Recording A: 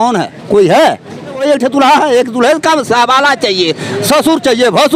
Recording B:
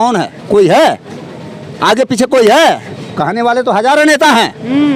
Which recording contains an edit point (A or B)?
A